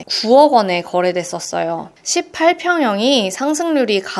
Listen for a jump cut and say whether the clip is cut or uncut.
cut